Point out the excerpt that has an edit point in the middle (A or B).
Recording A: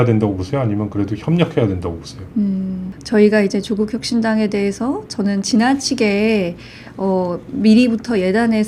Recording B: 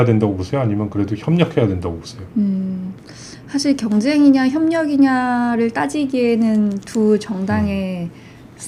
A